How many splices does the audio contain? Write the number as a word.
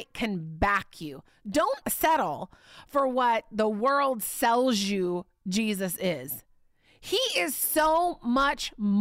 zero